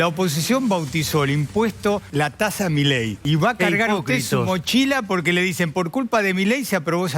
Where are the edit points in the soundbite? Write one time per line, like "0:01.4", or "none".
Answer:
0:02.1
0:03.2